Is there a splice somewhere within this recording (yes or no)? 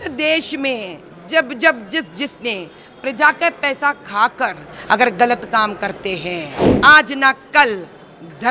yes